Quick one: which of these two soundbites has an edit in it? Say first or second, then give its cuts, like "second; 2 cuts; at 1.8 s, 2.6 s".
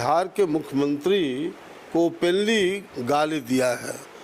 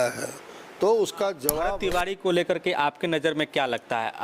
second; 1 cut; at 1.6 s